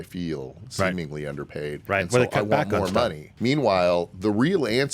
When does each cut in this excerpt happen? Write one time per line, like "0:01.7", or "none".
0:01.8
0:03.3